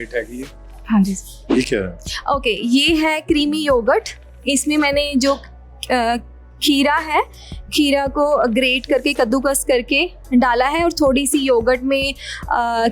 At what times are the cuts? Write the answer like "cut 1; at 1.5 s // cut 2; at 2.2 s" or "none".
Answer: cut 1; at 1.5 s